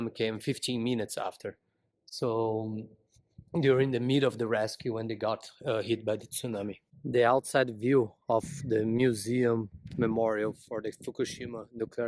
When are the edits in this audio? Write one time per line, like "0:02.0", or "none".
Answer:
none